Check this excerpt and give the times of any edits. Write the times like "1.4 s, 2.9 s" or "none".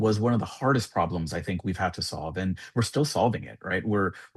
none